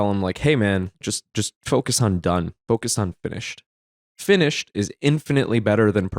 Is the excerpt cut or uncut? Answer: cut